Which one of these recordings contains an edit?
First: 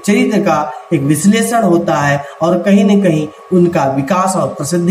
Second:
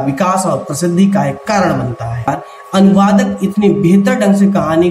second; 1 cut; at 2.3 s

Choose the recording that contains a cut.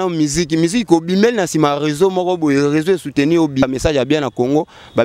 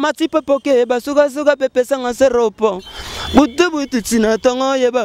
first; 1 cut; at 3.6 s

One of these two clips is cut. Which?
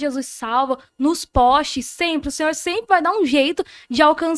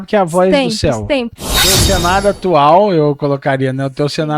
second; 1 cut; at 1.4 s

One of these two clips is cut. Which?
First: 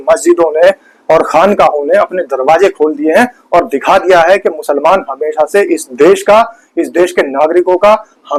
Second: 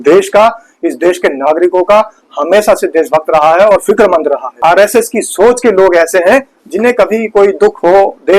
second; 1 cut; at 4.6 s

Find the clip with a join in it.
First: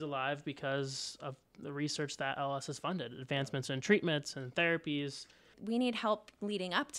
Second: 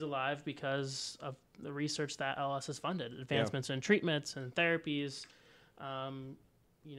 first; 1 cut; at 5.6 s

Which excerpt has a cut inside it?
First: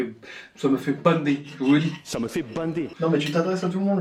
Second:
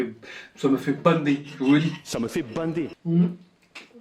second; 1 cut; at 2.9 s

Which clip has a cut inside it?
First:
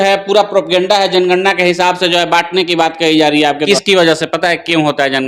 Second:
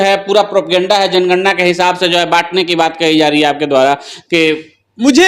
first; 1 cut; at 3.6 s

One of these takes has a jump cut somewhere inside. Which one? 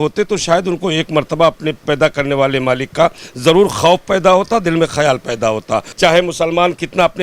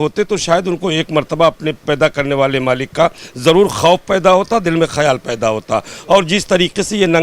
first; 1 cut; at 5.9 s

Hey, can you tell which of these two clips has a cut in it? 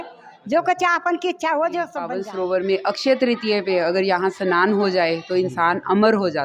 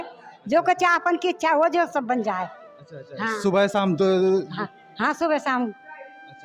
first; 1 cut; at 2.2 s

